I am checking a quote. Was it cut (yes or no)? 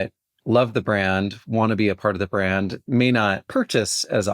yes